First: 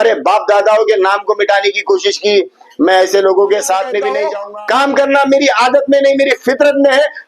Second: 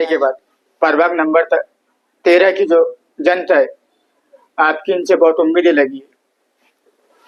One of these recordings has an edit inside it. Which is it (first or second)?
first